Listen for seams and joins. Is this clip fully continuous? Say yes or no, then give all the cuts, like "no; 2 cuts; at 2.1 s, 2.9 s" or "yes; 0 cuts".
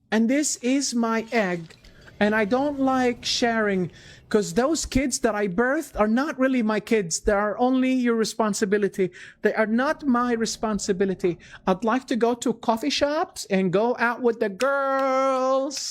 no; 1 cut; at 11.8 s